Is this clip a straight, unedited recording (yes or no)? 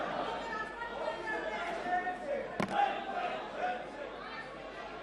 yes